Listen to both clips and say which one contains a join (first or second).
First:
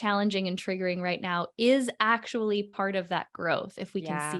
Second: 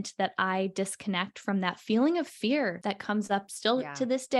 second